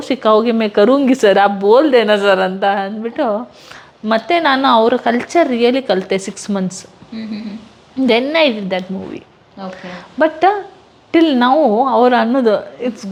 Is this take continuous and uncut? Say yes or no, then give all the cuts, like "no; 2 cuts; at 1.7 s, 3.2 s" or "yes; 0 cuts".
yes; 0 cuts